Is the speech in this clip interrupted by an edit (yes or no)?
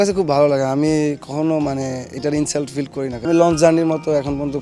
yes